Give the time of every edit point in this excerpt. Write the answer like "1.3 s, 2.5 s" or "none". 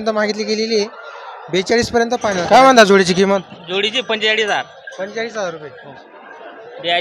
2.3 s